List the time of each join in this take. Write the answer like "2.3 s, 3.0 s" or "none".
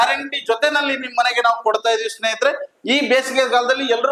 2.7 s